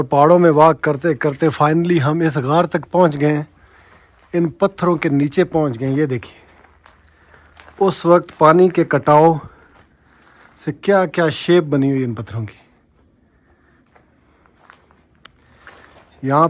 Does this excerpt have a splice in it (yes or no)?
no